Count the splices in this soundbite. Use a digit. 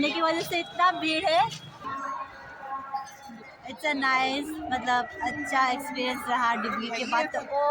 1